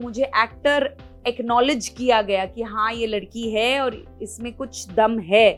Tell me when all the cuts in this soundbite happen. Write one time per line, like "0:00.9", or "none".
none